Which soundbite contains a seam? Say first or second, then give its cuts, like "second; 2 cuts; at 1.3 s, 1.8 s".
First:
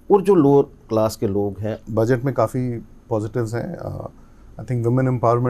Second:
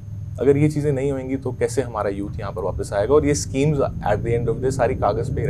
first; 1 cut; at 1.8 s